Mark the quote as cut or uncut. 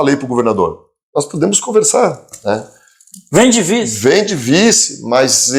uncut